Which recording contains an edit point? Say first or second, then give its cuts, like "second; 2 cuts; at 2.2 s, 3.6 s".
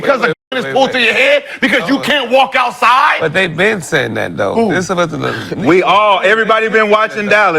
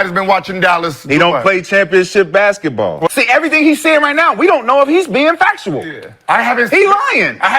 second; 1 cut; at 3.1 s